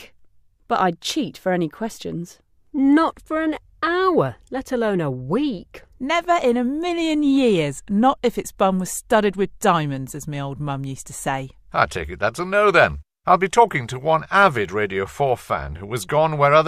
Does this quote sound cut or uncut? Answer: cut